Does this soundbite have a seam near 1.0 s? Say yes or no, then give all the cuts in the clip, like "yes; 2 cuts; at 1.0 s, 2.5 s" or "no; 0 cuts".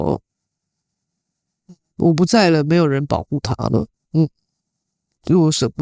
no; 1 cut; at 4.0 s